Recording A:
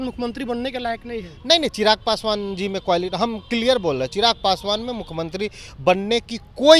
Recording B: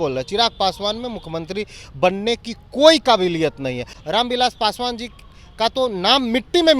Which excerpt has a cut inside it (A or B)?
B